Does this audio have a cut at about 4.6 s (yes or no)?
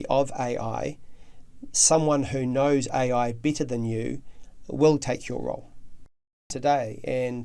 no